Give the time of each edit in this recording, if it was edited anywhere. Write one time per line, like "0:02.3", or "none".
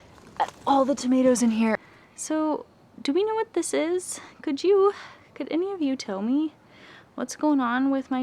0:01.9

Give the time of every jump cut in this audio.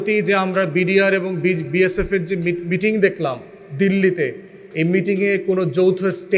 none

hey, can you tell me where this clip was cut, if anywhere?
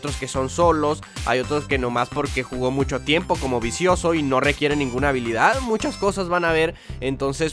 0:06.4

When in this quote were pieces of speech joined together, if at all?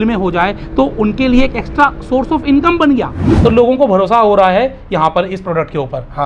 0:03.2

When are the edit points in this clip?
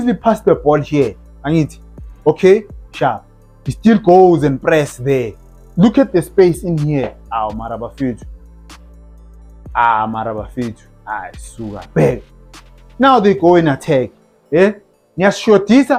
none

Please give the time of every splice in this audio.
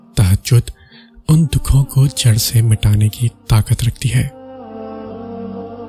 0:04.4

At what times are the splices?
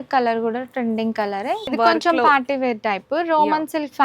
0:01.7

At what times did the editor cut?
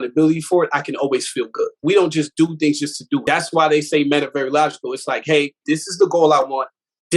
0:01.8
0:03.2

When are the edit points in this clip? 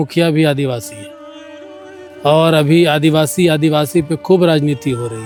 none

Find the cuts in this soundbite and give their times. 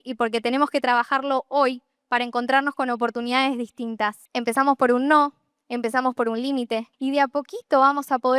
0:04.2
0:06.9

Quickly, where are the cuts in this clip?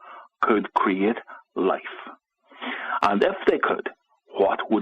0:03.0

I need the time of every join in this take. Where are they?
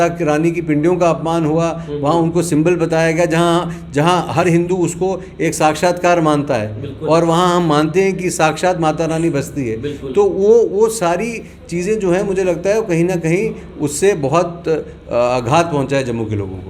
none

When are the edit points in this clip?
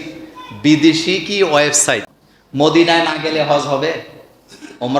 0:02.1

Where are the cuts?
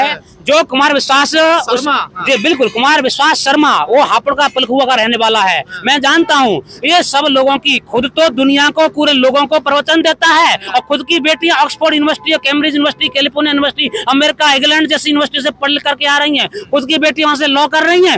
none

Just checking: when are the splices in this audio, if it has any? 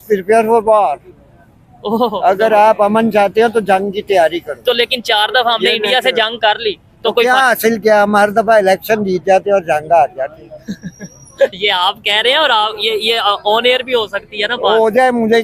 none

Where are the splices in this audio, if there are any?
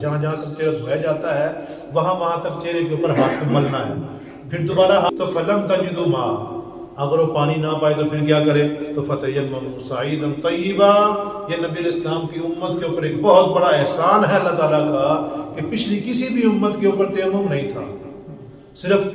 0:05.1

